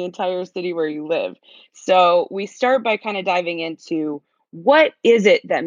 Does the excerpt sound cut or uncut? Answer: uncut